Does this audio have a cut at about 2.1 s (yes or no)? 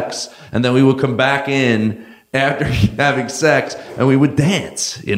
yes